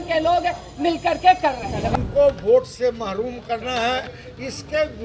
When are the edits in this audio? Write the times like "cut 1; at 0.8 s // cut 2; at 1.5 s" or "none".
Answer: cut 1; at 1.9 s